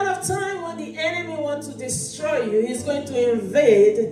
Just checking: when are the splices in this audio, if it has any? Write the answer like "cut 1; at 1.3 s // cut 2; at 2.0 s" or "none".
none